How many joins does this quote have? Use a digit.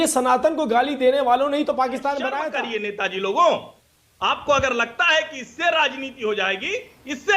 1